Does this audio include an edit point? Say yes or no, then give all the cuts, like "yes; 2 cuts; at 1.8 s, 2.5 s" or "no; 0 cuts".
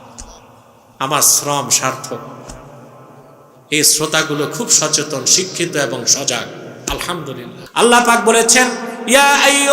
yes; 1 cut; at 7.6 s